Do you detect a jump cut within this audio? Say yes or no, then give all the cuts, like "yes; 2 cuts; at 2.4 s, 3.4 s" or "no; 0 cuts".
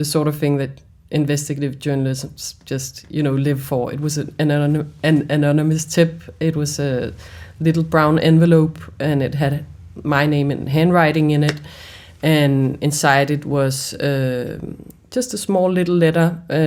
no; 0 cuts